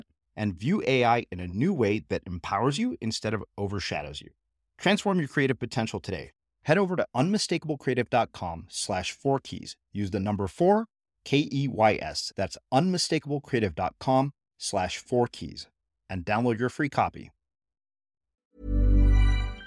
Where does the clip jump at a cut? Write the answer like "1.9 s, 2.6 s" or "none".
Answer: 18.5 s